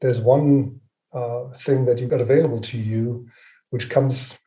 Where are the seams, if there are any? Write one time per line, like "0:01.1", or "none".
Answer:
0:02.0